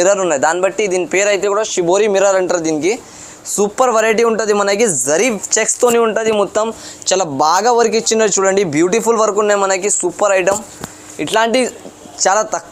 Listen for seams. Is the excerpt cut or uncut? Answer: uncut